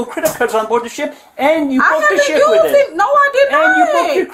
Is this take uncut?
yes; 0 cuts

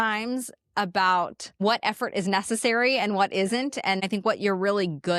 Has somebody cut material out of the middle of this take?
yes; 2 cuts; at 1.4 s, 4.0 s

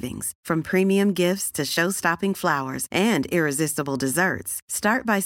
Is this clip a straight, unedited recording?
yes; 0 cuts

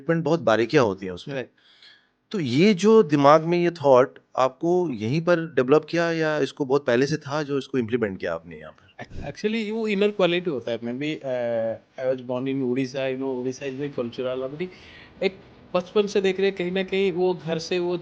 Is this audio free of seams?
no; 1 cut; at 9.1 s

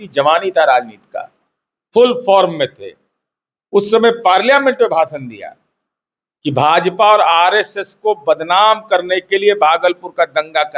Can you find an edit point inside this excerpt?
no; 0 cuts

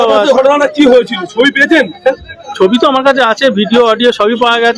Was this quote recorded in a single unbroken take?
yes; 0 cuts

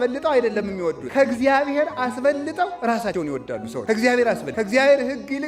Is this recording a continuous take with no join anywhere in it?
no; 3 cuts; at 1.0 s, 3.2 s, 4.5 s

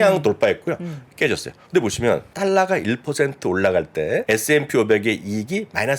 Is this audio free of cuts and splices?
no; 2 cuts; at 2.3 s, 4.2 s

